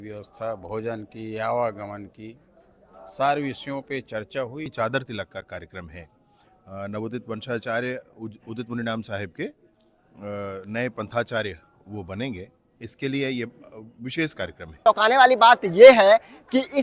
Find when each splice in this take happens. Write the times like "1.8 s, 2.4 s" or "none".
4.7 s, 14.8 s